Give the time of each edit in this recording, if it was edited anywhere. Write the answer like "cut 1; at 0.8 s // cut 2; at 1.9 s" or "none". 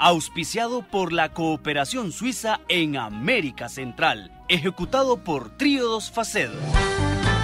cut 1; at 6.6 s